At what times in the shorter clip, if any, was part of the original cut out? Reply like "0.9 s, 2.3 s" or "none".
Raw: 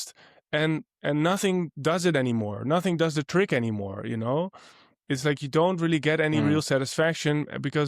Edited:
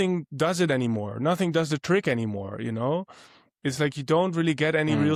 none